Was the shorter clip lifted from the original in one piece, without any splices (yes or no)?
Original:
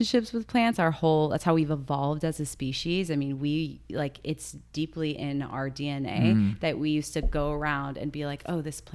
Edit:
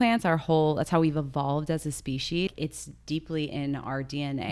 no